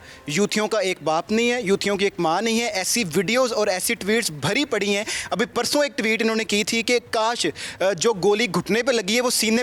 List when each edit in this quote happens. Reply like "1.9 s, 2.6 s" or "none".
none